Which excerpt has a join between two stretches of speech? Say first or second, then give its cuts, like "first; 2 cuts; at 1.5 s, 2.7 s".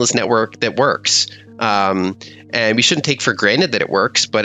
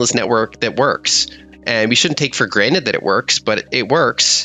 second; 1 cut; at 1.4 s